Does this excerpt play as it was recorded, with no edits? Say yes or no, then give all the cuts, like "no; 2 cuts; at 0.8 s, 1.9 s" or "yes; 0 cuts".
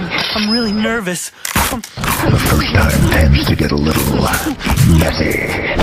yes; 0 cuts